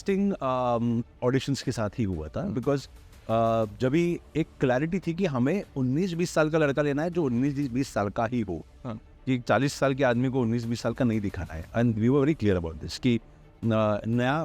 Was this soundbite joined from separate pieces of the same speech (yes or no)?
no